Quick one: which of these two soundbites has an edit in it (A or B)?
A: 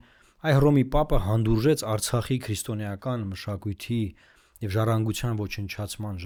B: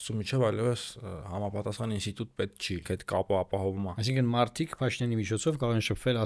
B